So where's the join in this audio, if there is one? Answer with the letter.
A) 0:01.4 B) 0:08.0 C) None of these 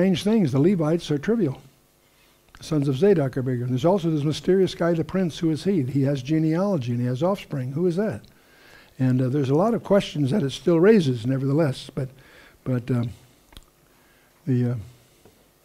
A